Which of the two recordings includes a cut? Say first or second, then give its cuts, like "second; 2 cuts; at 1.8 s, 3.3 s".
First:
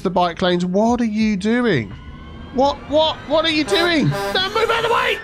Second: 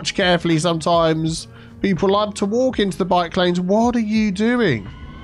first; 1 cut; at 3.2 s